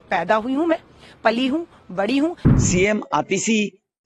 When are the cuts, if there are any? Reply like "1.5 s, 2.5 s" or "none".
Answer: 2.4 s